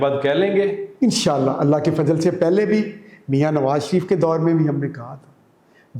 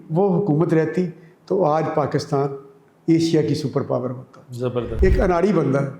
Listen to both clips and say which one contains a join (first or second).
second